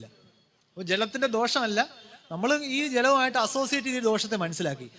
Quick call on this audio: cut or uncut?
uncut